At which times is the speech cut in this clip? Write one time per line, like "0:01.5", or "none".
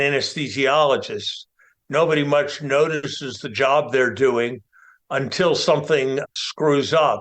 0:06.3